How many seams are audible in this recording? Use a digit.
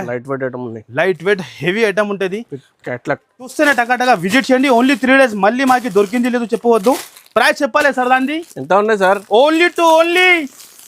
1